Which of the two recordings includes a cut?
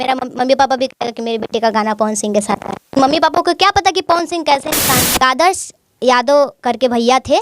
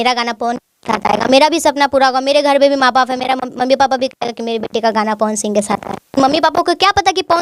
first; 1 cut; at 5.2 s

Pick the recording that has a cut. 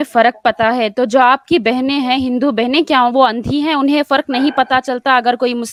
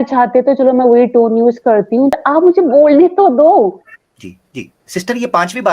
second; 1 cut; at 2.1 s

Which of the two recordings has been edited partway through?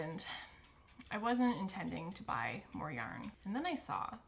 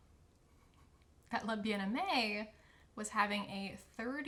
first; 1 cut; at 3.4 s

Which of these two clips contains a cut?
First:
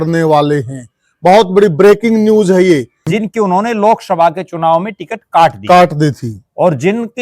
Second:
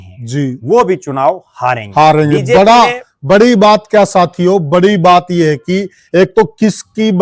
first; 1 cut; at 3.0 s

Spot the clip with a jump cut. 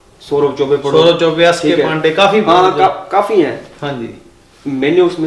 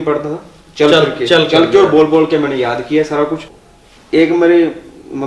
second; 1 cut; at 3.5 s

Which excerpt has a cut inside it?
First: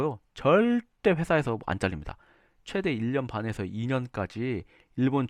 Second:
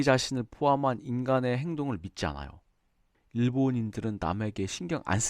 second; 1 cut; at 3.1 s

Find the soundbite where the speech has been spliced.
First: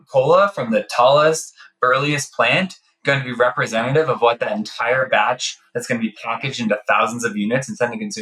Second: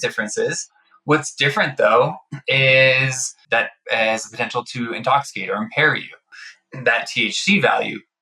second; 2 cuts; at 3.7 s, 6.3 s

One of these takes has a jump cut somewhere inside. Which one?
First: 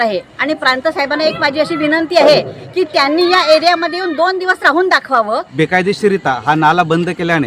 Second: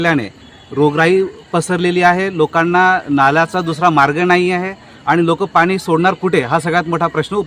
first; 1 cut; at 5.5 s

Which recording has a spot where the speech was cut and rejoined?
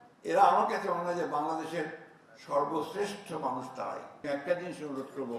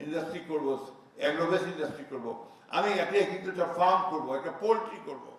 first; 1 cut; at 4.1 s

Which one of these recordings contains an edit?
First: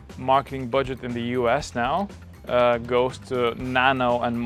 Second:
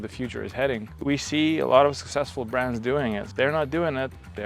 second; 2 cuts; at 1.0 s, 3.3 s

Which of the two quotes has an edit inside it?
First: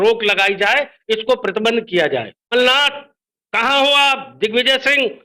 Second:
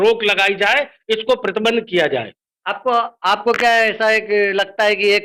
first; 1 cut; at 2.5 s

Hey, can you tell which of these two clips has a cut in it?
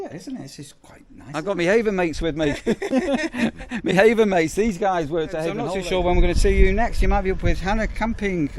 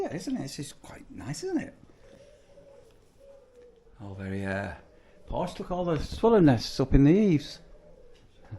first; 2 cuts; at 1.4 s, 5.6 s

